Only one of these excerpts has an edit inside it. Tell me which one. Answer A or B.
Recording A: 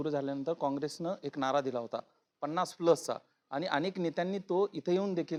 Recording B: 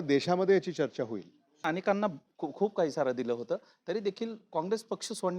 B